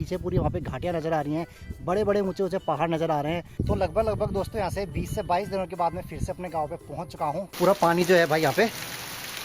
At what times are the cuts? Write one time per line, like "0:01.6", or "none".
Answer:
0:03.5
0:07.8